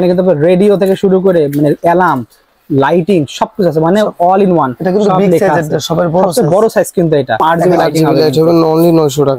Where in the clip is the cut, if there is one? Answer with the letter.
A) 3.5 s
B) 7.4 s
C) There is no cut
B